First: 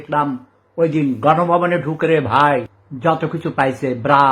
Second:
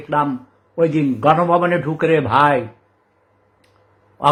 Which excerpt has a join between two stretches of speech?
first; 1 cut; at 2.8 s

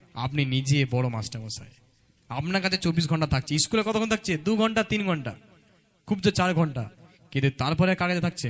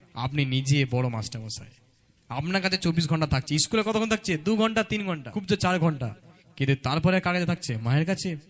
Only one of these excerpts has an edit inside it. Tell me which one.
second; 1 cut; at 5.3 s

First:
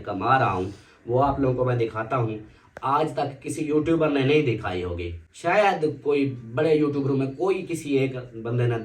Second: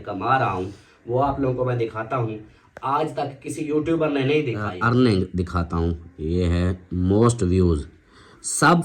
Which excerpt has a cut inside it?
second; 1 cut; at 4.7 s

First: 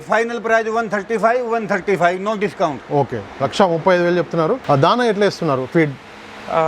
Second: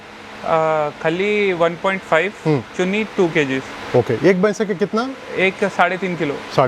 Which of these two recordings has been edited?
first; 1 cut; at 4.6 s

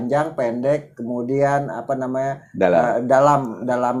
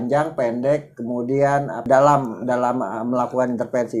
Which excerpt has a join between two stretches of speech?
second; 1 cut; at 1.8 s

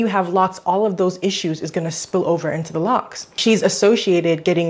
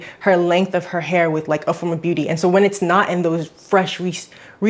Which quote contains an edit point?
first; 1 cut; at 3.2 s

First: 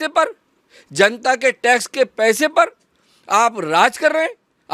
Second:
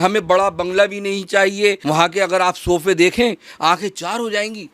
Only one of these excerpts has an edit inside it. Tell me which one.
second; 1 cut; at 1.8 s

